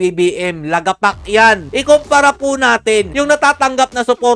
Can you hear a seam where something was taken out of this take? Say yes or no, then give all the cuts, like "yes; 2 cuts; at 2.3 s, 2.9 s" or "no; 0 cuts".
yes; 1 cut; at 1.7 s